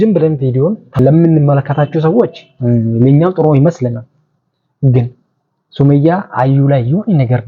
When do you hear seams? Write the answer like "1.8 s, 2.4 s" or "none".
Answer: 1.0 s